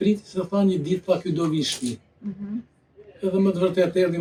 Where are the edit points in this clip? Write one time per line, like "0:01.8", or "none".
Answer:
none